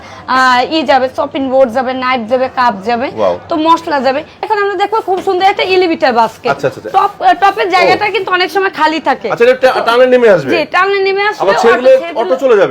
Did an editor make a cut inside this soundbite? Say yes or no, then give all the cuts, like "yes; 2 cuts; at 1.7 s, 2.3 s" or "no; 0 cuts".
yes; 1 cut; at 4.5 s